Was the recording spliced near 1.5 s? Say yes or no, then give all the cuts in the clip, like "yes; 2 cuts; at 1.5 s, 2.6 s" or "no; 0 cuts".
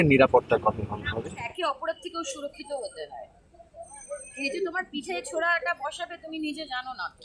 yes; 1 cut; at 1.5 s